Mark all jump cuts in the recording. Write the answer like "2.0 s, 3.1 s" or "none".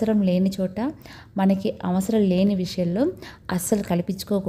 none